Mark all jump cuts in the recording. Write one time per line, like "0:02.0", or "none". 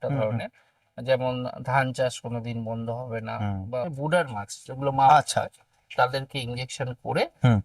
0:03.8